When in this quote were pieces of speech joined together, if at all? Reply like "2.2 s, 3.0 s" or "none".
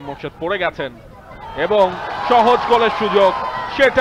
none